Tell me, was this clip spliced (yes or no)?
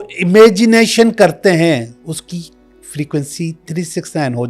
yes